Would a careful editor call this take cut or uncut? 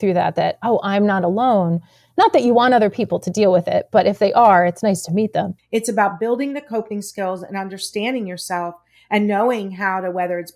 cut